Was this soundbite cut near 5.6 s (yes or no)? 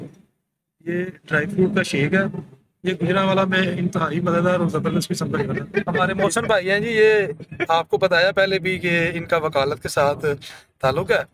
yes